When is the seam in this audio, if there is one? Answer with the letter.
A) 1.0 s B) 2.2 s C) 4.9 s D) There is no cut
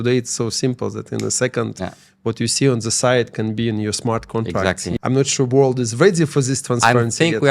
C